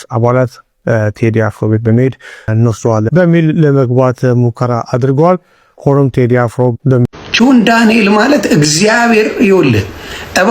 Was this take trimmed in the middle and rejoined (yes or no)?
yes